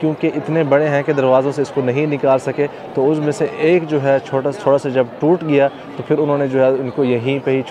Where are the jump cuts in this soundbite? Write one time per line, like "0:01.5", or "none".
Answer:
none